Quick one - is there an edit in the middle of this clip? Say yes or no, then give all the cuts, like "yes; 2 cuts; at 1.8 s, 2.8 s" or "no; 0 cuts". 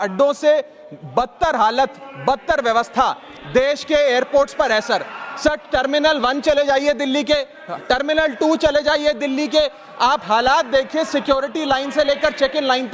no; 0 cuts